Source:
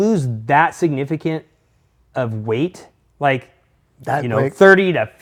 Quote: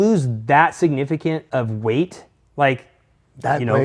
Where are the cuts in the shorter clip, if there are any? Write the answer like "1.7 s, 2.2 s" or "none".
1.4 s